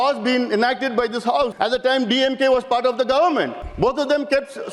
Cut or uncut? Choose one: cut